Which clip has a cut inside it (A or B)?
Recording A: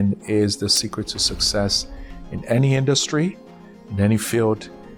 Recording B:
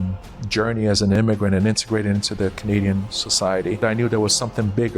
B